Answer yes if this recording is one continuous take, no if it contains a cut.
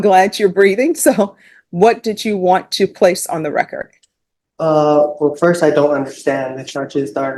yes